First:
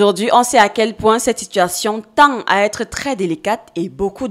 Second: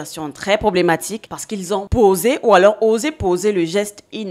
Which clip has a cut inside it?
second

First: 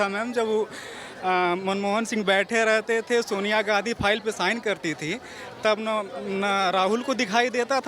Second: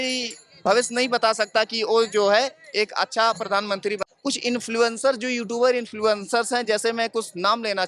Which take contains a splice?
second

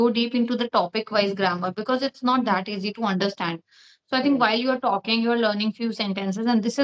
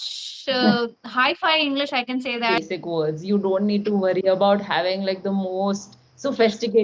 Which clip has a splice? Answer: second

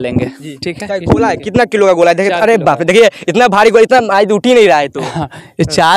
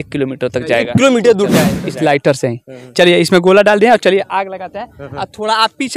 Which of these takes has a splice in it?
second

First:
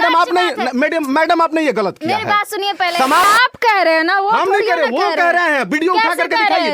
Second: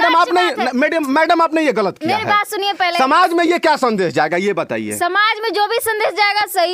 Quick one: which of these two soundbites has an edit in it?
first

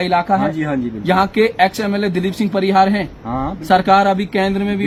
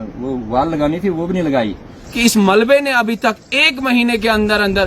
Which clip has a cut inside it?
second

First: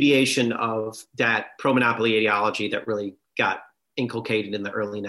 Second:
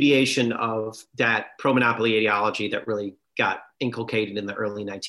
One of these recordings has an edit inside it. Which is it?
second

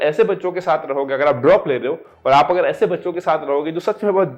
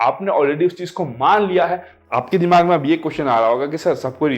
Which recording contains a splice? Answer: second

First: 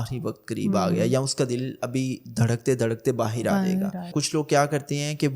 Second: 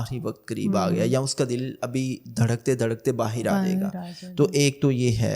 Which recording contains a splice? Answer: first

